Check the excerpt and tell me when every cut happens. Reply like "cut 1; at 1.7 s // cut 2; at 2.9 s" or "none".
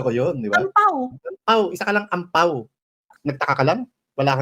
cut 1; at 3.1 s